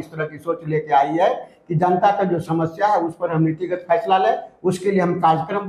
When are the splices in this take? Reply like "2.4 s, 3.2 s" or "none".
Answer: none